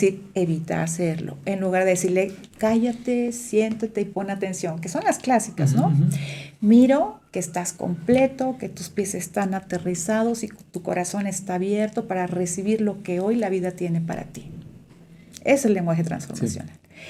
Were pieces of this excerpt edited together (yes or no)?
no